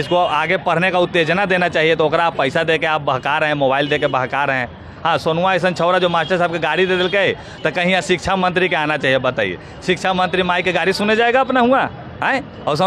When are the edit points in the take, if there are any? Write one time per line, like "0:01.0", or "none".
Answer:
none